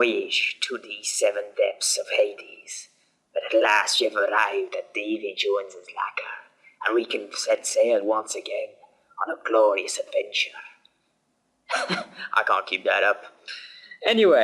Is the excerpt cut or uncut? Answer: cut